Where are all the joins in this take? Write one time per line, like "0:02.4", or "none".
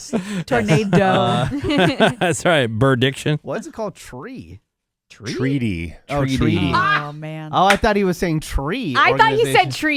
none